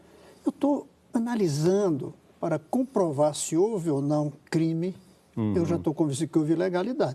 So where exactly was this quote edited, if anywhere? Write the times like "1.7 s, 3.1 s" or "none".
3.4 s